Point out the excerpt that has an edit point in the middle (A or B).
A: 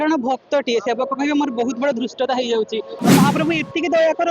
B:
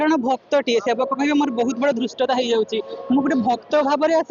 A